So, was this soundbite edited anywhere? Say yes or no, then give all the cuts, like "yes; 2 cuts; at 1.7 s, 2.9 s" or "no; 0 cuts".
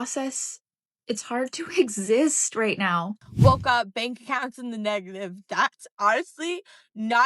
yes; 1 cut; at 3.2 s